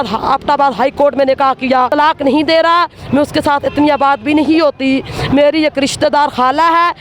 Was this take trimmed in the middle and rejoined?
yes; 1 cut; at 1.9 s

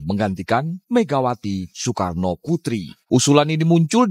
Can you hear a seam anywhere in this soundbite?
yes; 1 cut; at 2.9 s

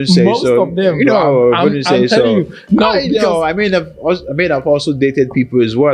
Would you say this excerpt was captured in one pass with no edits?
yes; 0 cuts

